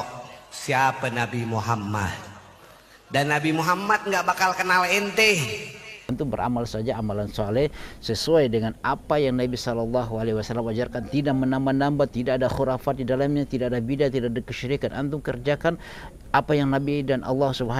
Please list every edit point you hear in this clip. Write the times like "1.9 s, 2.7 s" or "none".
6.0 s